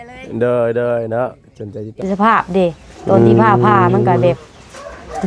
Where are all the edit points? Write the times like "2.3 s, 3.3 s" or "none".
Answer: 1.9 s